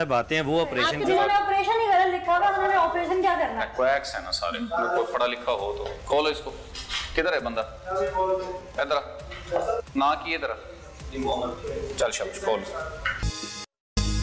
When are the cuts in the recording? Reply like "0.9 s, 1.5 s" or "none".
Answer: 0.9 s, 13.3 s